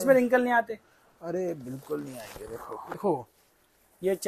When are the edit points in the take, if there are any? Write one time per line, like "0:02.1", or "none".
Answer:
0:03.0